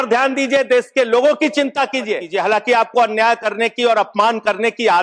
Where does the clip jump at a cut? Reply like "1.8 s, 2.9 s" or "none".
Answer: 2.3 s